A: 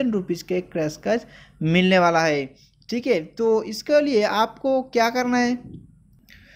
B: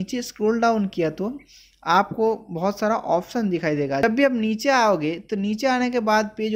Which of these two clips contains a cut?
B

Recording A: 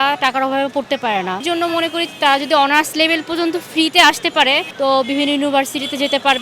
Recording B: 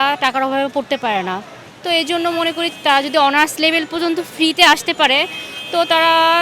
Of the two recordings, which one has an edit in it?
A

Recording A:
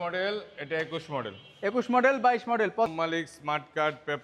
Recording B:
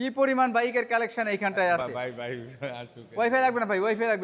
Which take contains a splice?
A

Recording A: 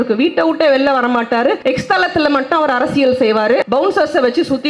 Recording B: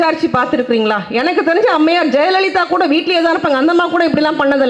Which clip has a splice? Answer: A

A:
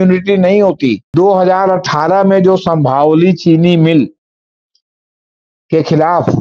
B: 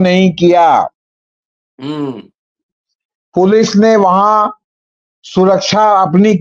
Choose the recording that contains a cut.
A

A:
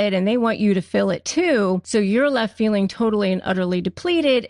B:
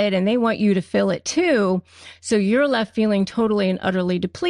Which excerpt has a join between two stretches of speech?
A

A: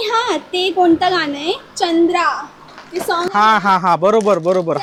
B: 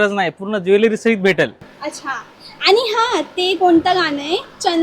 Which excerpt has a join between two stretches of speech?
B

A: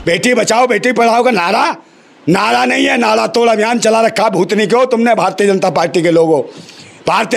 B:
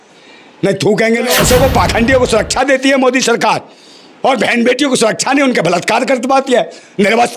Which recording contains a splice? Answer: B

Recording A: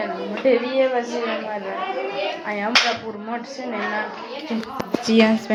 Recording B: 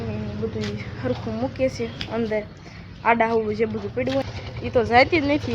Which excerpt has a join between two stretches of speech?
B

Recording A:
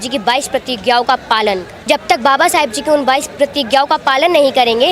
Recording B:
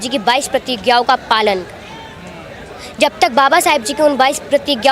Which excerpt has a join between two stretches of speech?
A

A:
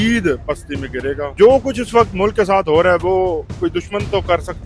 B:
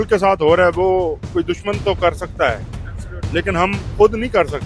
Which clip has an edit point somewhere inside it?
A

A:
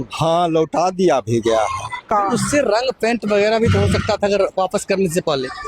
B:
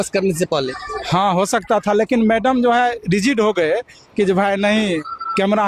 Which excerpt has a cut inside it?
A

